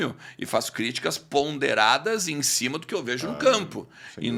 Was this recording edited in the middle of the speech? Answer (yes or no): no